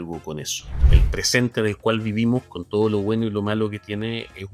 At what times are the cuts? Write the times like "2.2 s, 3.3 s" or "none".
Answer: 0.9 s